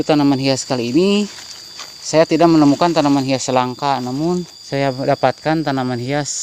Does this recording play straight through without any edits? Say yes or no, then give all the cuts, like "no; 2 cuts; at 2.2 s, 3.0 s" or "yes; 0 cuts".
no; 1 cut; at 4.6 s